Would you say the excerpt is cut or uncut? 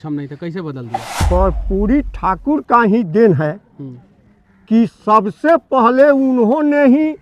cut